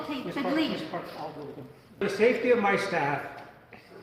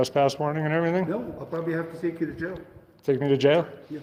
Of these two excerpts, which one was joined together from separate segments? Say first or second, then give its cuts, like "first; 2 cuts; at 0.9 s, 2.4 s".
first; 1 cut; at 2.0 s